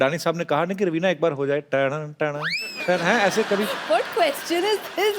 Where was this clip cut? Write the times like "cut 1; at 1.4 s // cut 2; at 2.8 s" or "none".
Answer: cut 1; at 2.6 s